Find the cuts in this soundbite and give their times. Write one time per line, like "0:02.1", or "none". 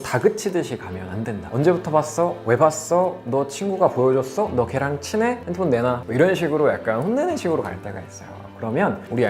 0:06.1